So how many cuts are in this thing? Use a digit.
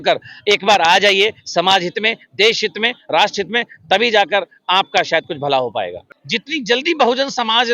1